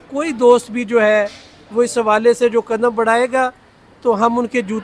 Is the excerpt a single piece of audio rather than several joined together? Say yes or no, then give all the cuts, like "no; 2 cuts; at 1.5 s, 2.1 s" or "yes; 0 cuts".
yes; 0 cuts